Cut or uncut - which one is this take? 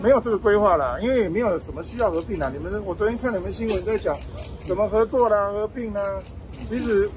uncut